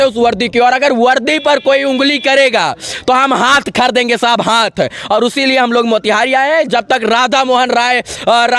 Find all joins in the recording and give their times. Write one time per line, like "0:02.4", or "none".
none